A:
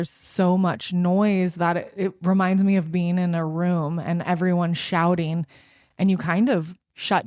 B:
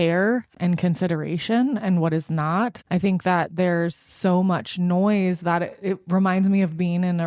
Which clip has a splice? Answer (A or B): B